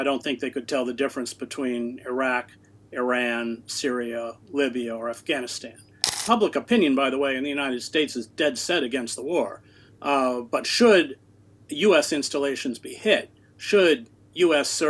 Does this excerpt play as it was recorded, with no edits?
no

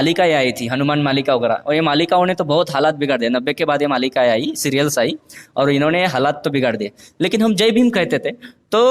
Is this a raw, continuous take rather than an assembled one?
yes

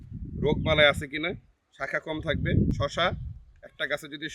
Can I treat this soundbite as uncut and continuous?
no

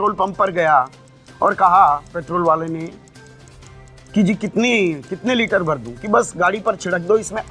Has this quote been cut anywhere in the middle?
no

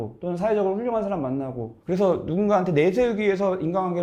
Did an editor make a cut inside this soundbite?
no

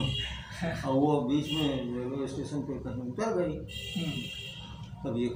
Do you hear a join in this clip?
no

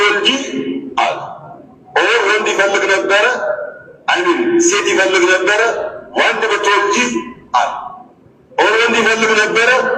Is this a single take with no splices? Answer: yes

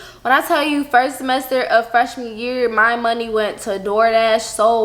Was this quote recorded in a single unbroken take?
yes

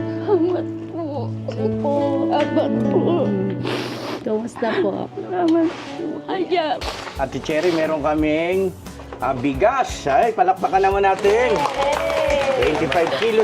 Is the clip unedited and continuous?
no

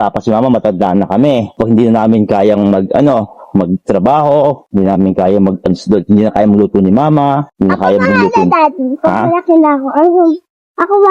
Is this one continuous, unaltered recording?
yes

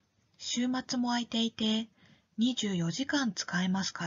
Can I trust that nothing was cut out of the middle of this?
no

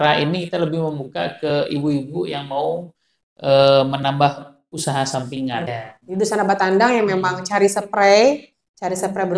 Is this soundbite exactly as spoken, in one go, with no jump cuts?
no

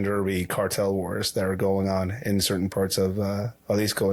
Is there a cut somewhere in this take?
no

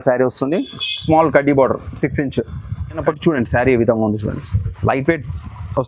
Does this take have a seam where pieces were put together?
yes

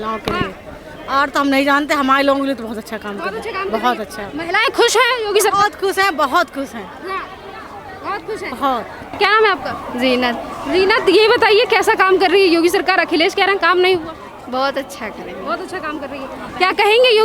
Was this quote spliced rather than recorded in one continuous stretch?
no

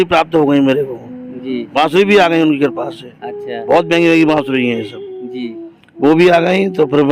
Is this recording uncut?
yes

